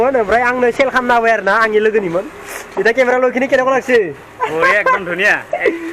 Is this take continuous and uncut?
yes; 0 cuts

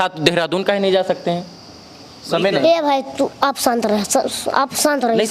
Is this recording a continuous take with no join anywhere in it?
yes; 0 cuts

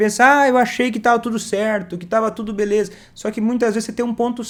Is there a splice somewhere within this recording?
no; 0 cuts

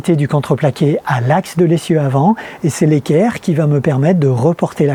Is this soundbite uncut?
yes; 0 cuts

